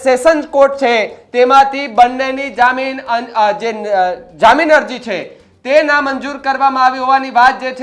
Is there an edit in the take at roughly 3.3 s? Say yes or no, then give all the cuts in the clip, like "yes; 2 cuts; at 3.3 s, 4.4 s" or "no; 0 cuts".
no; 0 cuts